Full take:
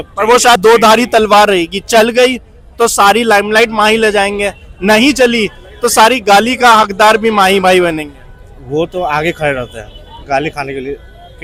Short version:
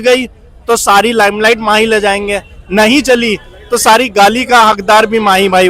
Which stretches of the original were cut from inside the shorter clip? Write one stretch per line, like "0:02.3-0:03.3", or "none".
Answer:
none

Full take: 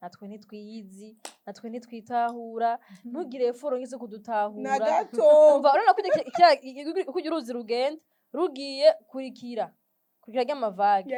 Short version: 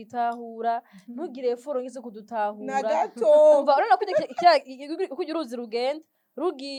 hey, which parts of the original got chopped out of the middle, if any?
none

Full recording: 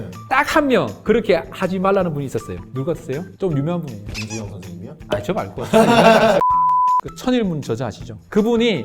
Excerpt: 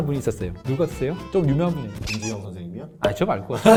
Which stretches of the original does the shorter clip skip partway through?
none

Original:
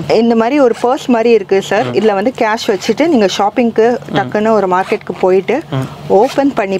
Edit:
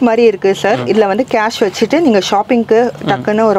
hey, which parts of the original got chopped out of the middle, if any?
none

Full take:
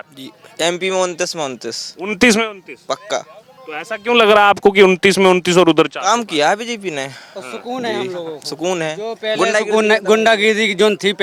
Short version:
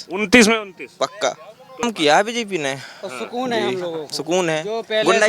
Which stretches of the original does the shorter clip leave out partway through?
0:03.8-0:06.2

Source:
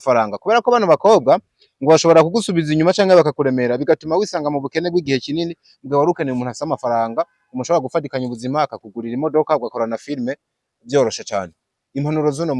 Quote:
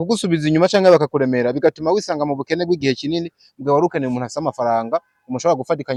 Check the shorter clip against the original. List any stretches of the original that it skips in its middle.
none

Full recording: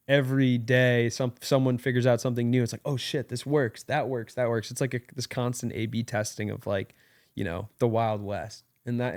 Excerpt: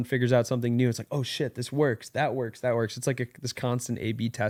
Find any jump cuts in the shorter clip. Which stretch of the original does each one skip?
none

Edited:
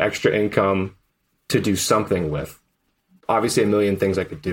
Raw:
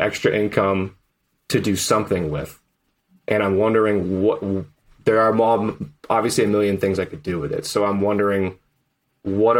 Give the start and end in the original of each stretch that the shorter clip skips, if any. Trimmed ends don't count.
0:03.1-0:05.9

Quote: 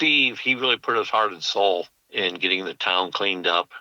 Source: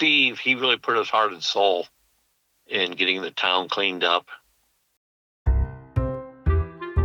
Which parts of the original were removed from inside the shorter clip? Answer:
0:02.0-0:02.6

